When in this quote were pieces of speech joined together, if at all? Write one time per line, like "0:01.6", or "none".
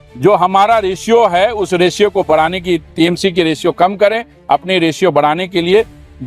none